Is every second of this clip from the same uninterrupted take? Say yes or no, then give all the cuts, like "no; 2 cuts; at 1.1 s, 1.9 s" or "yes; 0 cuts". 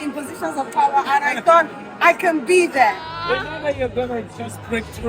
no; 1 cut; at 3.0 s